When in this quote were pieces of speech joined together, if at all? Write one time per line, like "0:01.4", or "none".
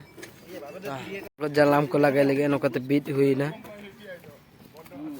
0:01.2